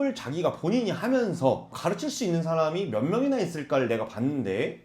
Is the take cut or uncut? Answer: uncut